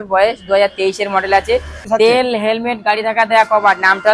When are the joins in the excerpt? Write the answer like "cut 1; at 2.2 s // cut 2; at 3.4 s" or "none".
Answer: cut 1; at 1.8 s